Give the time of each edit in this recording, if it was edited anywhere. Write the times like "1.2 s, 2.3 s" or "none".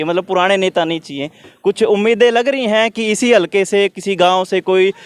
none